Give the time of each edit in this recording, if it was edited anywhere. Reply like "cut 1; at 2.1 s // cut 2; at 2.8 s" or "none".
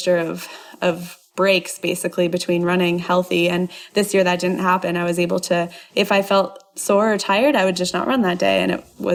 none